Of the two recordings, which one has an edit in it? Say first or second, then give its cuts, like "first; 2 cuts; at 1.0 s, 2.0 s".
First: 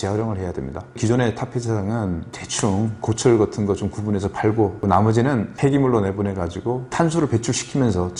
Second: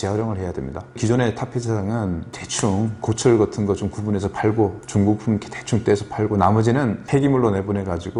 first; 2 cuts; at 4.8 s, 6.9 s